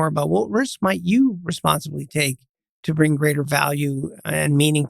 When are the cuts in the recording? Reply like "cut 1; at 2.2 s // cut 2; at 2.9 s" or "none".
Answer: cut 1; at 2.6 s

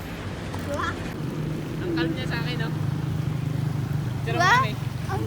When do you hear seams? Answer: cut 1; at 1.1 s

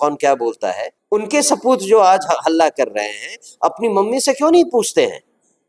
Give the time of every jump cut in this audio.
cut 1; at 0.9 s

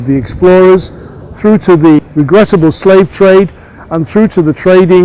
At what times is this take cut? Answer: cut 1; at 2.0 s

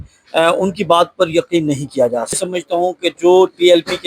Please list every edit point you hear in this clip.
cut 1; at 2.4 s

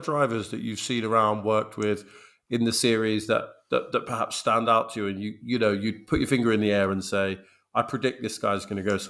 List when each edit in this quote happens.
none

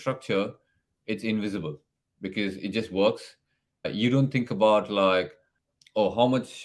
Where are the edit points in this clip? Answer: cut 1; at 3.9 s

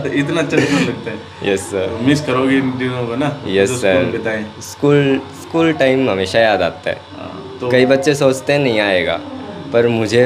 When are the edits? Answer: none

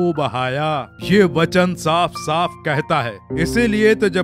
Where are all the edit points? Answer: cut 1; at 3.2 s

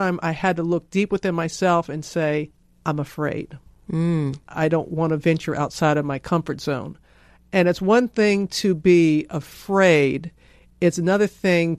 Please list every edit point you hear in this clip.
cut 1; at 2.6 s

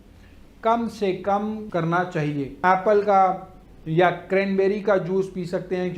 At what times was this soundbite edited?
cut 1; at 2.6 s

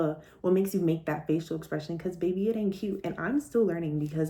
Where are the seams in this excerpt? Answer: none

